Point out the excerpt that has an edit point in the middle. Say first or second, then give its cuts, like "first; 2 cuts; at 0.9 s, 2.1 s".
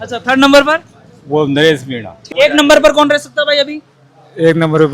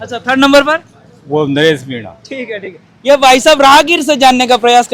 first; 1 cut; at 2.2 s